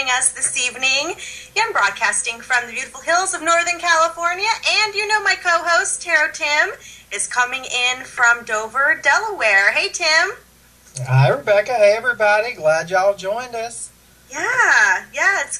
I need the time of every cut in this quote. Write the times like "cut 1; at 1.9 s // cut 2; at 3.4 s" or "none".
cut 1; at 2.9 s